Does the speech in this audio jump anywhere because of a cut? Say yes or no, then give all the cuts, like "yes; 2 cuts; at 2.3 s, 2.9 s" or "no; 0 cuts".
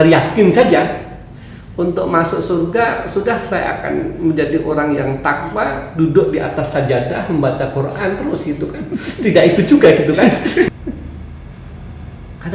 yes; 1 cut; at 10.7 s